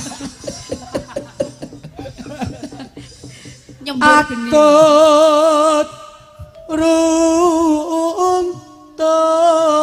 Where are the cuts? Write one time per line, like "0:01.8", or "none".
none